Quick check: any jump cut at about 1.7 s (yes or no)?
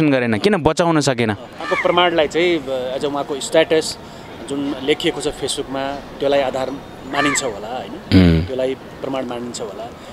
yes